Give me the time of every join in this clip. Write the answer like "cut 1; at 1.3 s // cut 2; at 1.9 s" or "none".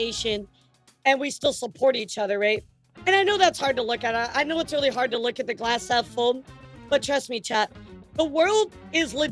none